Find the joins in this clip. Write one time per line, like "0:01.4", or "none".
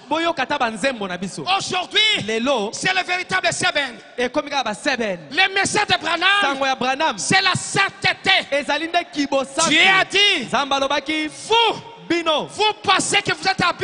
none